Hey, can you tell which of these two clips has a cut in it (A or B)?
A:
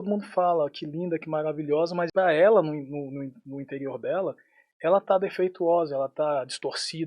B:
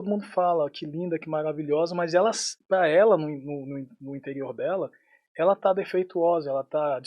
A